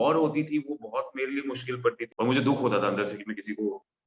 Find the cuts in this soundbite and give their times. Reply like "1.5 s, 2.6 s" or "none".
2.0 s